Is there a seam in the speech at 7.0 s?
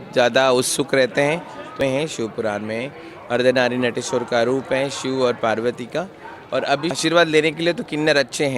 yes; 2 cuts; at 1.8 s, 7.0 s

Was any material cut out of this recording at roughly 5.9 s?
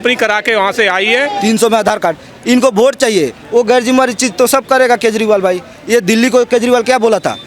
no; 1 cut; at 1.4 s

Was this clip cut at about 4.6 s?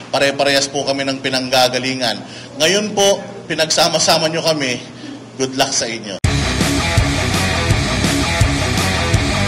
no; 1 cut; at 6.2 s

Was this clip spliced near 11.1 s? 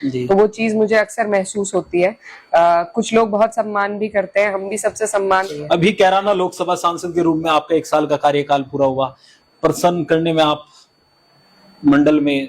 no; 1 cut; at 5.5 s

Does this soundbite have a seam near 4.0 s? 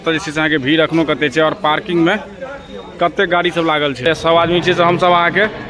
yes; 1 cut; at 4.0 s

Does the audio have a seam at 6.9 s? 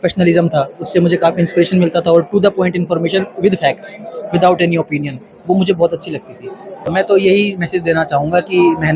yes; 1 cut; at 6.9 s

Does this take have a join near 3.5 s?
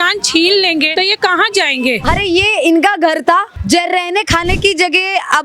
yes; 3 cuts; at 0.9 s, 2.0 s, 3.5 s

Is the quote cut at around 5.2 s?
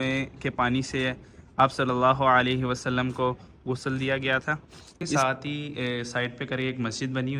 yes; 1 cut; at 5.2 s

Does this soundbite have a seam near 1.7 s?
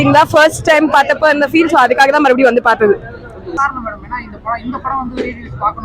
no; 1 cut; at 3.6 s

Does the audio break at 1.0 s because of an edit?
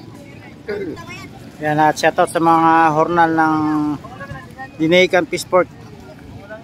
yes; 1 cut; at 1.0 s

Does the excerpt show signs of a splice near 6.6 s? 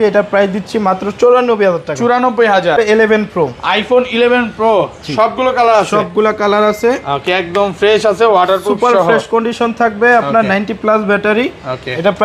no; 1 cut; at 2.8 s

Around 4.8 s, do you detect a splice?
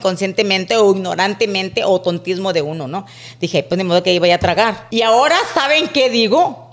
yes; 1 cut; at 4.8 s

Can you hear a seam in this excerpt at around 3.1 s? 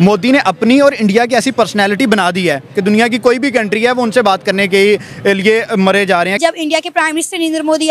no; 1 cut; at 6.4 s

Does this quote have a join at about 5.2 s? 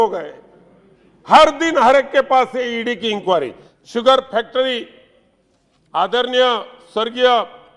no; 1 cut; at 3.6 s

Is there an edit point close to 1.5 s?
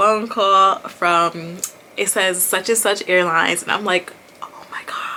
no; 0 cuts

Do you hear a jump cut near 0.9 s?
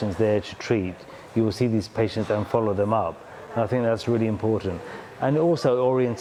no; 0 cuts

